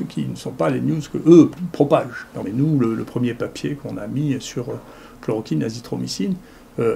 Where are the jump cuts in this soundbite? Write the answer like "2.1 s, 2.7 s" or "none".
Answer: 2.5 s